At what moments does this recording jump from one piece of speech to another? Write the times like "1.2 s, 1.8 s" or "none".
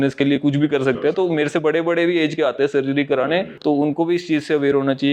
none

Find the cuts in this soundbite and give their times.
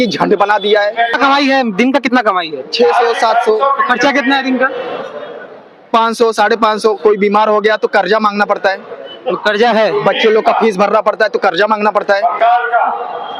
1.2 s

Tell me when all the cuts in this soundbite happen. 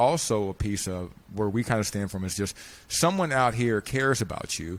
none

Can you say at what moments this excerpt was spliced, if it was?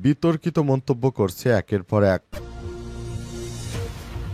2.3 s

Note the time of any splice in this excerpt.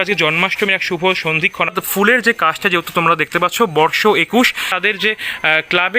1.7 s, 4.7 s

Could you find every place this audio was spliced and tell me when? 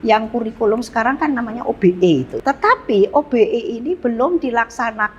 2.3 s

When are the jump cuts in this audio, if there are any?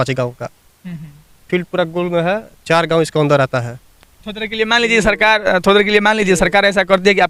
none

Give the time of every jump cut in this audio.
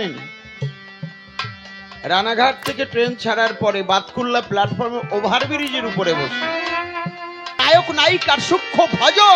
7.5 s

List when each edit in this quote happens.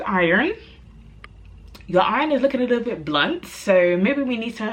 none

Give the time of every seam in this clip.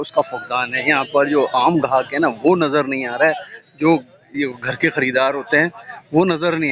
none

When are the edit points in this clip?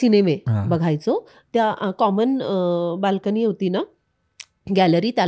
none

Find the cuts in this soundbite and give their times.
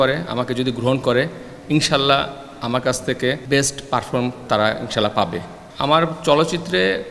3.4 s, 5.6 s

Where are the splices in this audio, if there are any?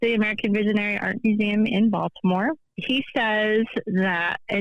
2.7 s

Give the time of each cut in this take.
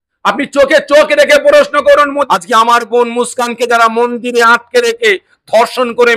2.3 s

